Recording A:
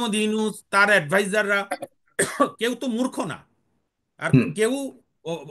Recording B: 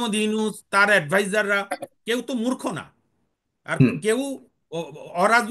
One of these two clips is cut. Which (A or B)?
B